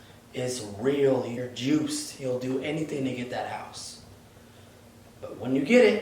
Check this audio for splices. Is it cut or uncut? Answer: cut